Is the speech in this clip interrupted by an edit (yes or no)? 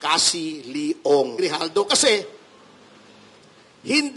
yes